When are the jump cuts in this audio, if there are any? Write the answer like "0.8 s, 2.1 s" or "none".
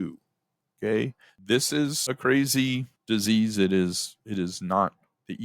1.3 s, 2.0 s, 2.9 s